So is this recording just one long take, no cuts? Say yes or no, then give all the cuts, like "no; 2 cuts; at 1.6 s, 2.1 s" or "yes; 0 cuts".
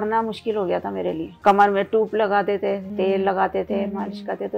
no; 2 cuts; at 1.3 s, 2.9 s